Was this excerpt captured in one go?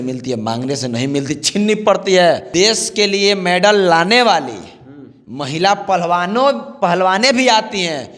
no; 1 cut; at 2.4 s

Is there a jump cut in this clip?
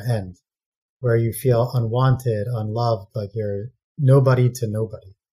no; 0 cuts

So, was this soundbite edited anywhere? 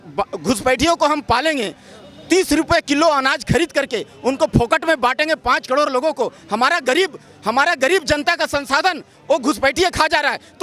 no; 0 cuts

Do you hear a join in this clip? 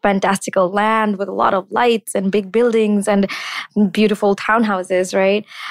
no; 0 cuts

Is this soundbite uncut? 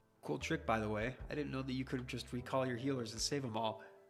yes; 0 cuts

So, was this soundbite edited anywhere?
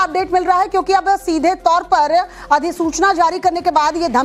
no; 0 cuts

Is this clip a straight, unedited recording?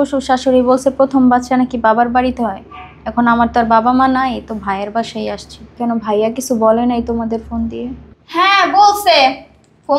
yes; 0 cuts

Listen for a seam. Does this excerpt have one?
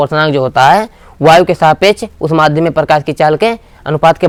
no; 0 cuts

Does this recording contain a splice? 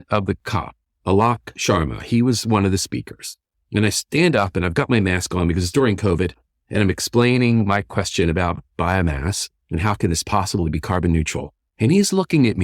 no; 0 cuts

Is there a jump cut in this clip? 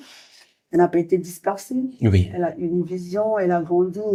no; 0 cuts

